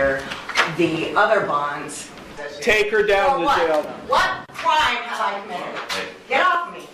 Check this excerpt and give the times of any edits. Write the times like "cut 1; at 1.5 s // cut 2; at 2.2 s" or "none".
cut 1; at 2.3 s